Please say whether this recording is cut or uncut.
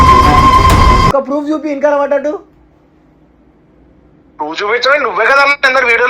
cut